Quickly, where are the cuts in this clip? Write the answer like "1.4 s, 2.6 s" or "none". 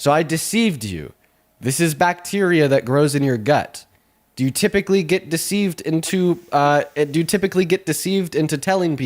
none